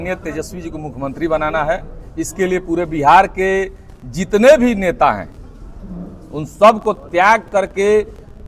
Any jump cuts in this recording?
no; 0 cuts

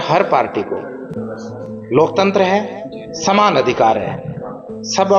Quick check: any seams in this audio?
no; 0 cuts

